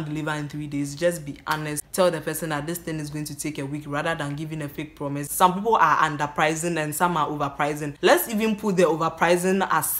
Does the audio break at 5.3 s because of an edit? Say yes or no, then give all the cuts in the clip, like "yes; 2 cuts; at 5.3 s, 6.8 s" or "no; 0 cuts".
yes; 3 cuts; at 1.8 s, 5.3 s, 7.9 s